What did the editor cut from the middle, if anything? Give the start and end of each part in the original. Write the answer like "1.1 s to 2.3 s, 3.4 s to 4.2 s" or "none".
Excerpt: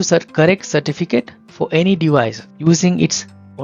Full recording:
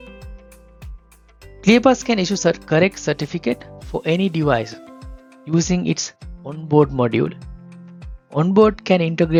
4.8 s to 5.3 s